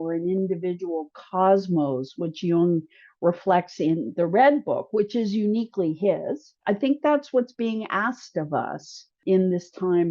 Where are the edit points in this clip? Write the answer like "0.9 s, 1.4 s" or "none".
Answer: 6.5 s, 9.2 s